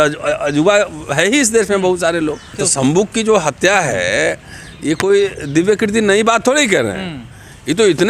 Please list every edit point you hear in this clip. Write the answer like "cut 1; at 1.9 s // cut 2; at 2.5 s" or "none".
cut 1; at 2.6 s